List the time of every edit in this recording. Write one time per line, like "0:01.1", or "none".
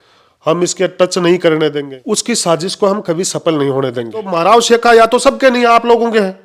0:01.9
0:04.3

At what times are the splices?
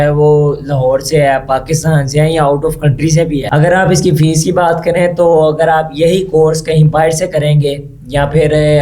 0:03.5

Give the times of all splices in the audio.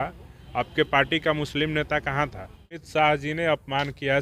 0:02.8

